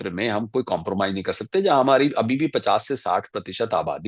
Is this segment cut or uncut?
uncut